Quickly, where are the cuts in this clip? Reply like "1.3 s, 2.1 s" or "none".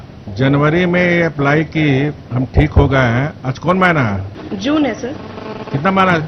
4.3 s